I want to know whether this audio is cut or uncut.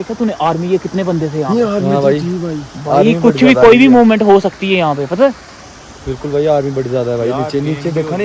uncut